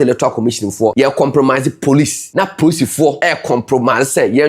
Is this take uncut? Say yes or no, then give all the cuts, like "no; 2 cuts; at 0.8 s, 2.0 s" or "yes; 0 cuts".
no; 3 cuts; at 0.9 s, 2.2 s, 3.2 s